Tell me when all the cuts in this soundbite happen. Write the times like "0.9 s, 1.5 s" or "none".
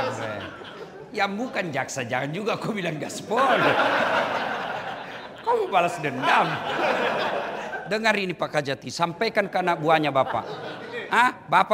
7.7 s